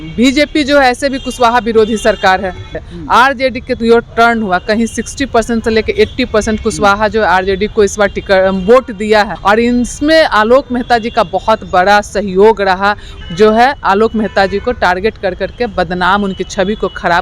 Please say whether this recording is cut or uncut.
cut